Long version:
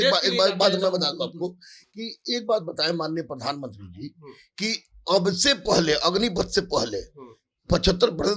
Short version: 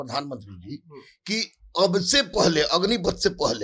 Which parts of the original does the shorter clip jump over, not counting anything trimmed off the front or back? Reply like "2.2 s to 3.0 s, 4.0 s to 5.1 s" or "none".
none